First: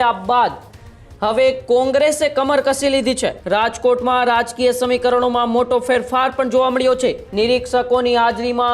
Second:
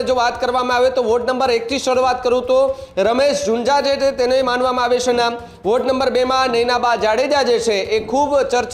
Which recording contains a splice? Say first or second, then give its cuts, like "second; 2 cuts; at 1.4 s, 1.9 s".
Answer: first; 2 cuts; at 3.3 s, 7.2 s